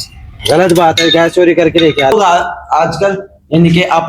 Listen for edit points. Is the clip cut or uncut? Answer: cut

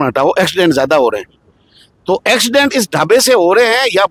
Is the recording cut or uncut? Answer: uncut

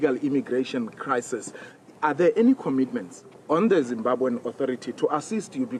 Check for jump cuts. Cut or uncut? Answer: uncut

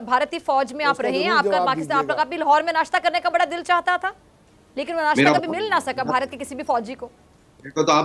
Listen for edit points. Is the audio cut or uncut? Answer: uncut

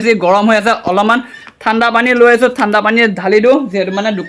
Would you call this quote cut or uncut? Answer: uncut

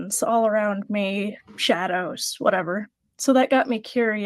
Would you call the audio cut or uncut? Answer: cut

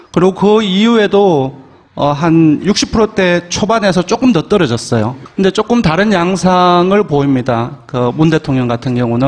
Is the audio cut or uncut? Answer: cut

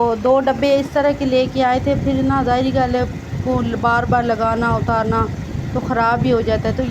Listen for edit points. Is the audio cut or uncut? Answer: uncut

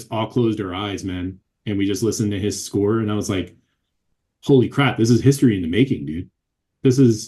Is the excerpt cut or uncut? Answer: uncut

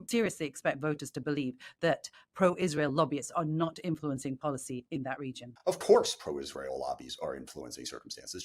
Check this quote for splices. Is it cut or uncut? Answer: cut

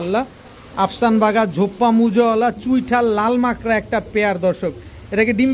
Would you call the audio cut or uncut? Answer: uncut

